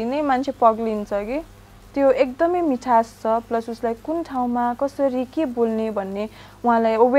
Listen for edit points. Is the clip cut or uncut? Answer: uncut